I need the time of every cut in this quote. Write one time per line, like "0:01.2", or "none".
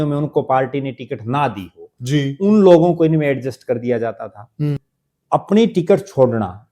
0:04.9